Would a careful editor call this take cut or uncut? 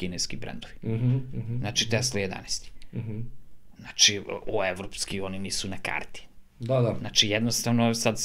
uncut